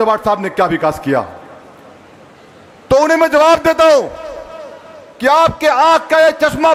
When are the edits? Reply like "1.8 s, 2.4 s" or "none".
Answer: none